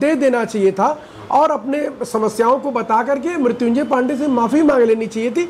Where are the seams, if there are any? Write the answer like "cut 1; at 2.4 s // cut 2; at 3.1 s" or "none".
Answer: none